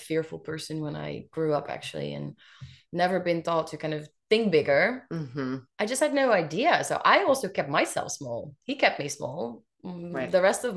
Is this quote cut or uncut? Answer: uncut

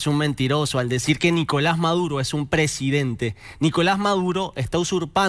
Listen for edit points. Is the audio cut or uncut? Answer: uncut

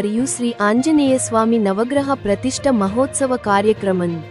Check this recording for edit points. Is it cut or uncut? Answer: uncut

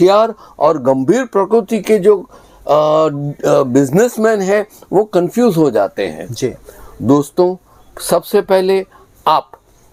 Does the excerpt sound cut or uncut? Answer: uncut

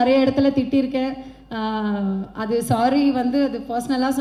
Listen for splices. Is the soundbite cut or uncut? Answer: uncut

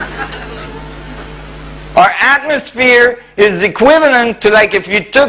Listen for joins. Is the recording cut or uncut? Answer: cut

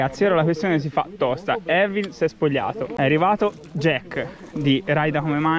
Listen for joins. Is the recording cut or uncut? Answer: cut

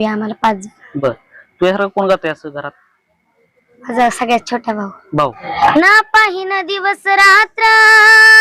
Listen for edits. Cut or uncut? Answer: cut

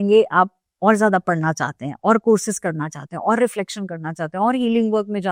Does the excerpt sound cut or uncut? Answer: uncut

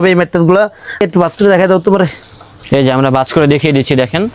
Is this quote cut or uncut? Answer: cut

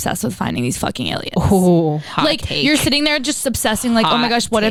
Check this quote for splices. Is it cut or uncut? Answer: uncut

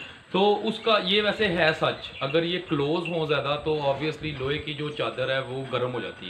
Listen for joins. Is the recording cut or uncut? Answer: uncut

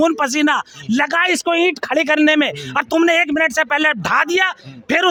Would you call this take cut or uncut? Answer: uncut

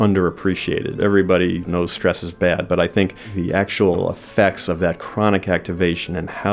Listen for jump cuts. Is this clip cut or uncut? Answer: cut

